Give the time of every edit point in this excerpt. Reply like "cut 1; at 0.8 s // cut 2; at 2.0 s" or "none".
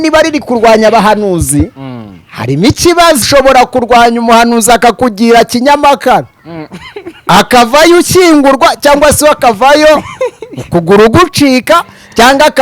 cut 1; at 3.2 s